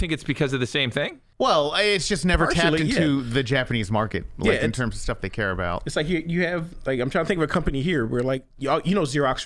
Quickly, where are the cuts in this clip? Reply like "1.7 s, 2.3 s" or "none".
1.2 s, 8.5 s